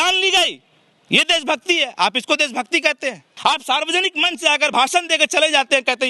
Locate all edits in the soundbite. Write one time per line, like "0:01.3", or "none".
0:03.3